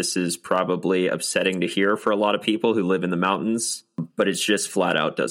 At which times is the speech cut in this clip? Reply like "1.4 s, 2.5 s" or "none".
4.0 s